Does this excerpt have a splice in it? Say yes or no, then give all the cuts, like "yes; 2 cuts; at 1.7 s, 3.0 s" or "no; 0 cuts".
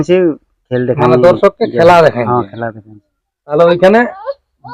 yes; 1 cut; at 3.5 s